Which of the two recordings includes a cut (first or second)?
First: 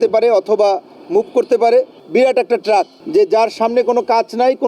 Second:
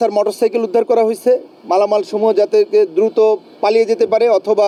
first